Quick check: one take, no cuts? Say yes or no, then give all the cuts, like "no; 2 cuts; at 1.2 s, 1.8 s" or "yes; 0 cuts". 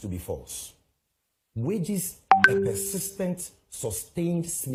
yes; 0 cuts